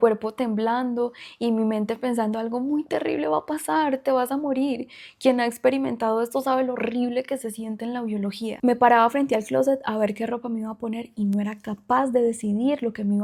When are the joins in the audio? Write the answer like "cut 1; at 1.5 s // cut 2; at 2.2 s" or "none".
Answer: none